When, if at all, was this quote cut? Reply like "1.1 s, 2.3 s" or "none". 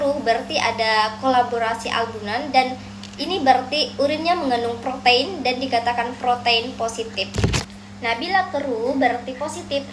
7.8 s